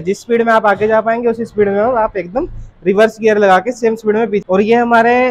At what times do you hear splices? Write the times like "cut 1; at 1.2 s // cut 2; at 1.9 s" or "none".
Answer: cut 1; at 4.4 s